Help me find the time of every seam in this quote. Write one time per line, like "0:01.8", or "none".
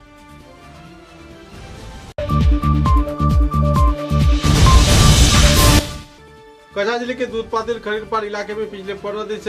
none